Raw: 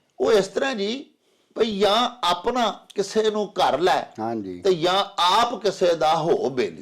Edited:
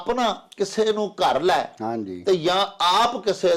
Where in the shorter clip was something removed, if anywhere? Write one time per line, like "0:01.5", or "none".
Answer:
none